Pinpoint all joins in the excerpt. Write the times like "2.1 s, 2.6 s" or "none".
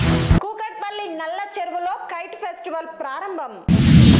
none